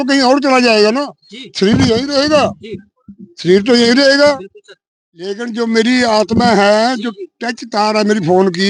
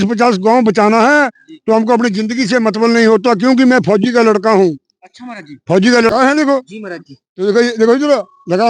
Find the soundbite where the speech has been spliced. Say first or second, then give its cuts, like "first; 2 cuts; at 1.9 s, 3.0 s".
second; 1 cut; at 6.1 s